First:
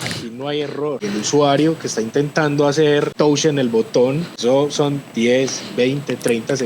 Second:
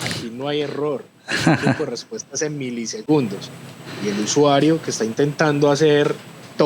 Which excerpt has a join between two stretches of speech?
first; 3 cuts; at 1.0 s, 3.1 s, 4.3 s

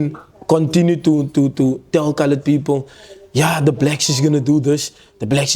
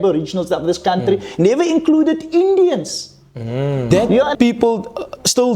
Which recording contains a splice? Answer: second; 1 cut; at 4.3 s

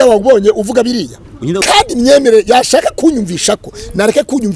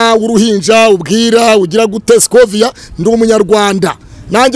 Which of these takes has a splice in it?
first; 1 cut; at 1.4 s

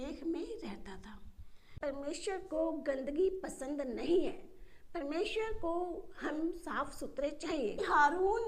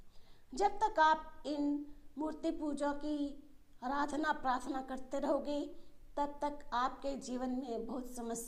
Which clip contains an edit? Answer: first; 2 cuts; at 1.8 s, 7.8 s

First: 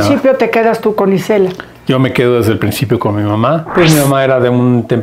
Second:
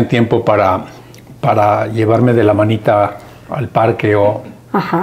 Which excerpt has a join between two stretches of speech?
first; 1 cut; at 3.6 s

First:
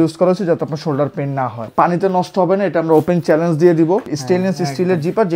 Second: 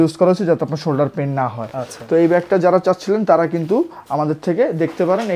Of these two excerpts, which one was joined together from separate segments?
first; 2 cuts; at 1.6 s, 4.1 s

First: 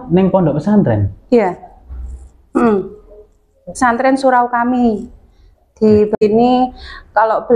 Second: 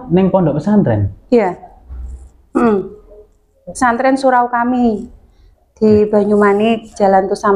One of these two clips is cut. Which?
first; 1 cut; at 6.1 s

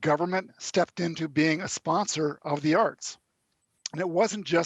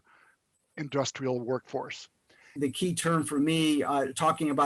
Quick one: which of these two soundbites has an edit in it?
second; 1 cut; at 2.6 s

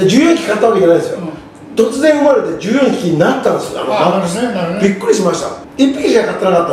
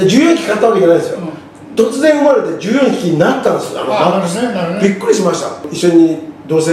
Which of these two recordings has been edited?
second; 1 cut; at 5.6 s

